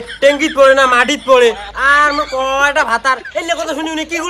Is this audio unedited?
yes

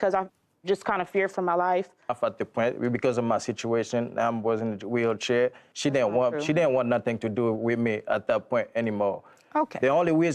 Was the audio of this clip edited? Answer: yes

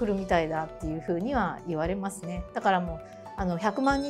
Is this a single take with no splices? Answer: yes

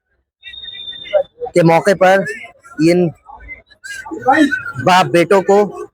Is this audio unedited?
yes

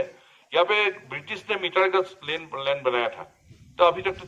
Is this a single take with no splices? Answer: yes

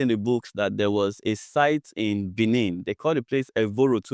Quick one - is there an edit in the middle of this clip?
no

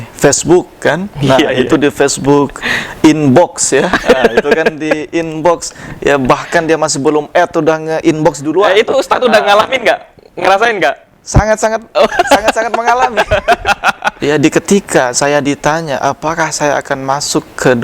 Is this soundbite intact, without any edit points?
no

